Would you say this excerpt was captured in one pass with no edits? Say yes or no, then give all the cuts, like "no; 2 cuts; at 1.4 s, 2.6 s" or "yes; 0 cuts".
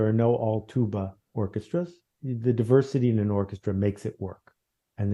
no; 1 cut; at 2.2 s